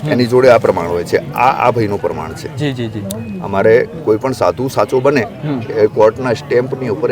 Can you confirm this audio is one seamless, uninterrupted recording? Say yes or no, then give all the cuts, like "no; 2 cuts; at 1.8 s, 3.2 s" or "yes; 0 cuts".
yes; 0 cuts